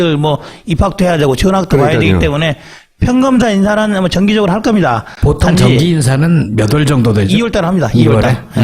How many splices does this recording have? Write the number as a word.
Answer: one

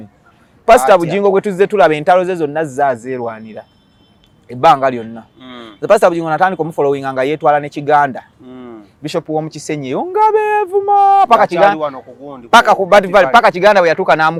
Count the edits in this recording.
zero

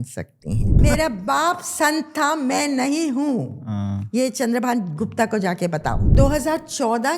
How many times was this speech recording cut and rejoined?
two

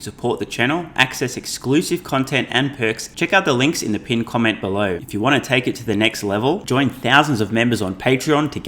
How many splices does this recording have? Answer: two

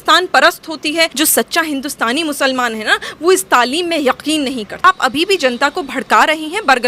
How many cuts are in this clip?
two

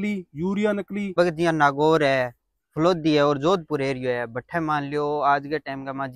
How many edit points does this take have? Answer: one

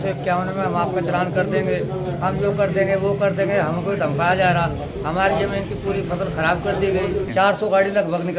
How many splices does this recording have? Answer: one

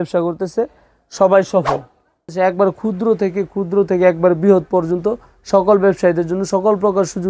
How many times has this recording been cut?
one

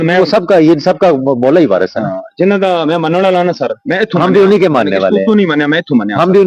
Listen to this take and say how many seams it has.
zero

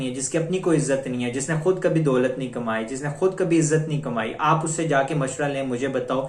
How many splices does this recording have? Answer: zero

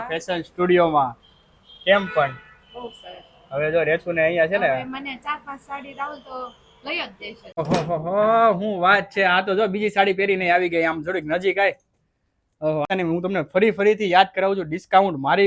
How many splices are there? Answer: two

